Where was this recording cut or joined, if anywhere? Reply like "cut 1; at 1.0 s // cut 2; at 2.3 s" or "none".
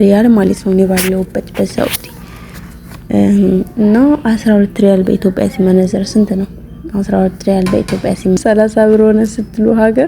cut 1; at 8.4 s